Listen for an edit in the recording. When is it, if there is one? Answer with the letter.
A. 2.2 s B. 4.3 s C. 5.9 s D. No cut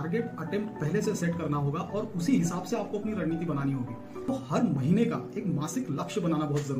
B